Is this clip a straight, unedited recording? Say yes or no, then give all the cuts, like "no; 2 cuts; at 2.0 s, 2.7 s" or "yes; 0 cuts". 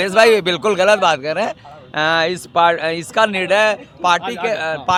yes; 0 cuts